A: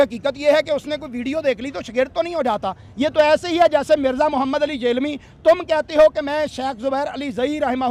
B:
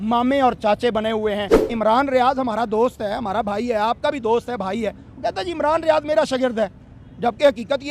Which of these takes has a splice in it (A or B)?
B